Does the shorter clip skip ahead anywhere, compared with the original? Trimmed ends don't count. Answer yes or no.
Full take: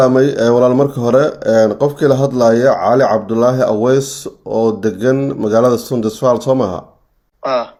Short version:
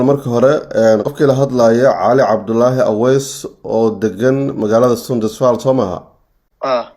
yes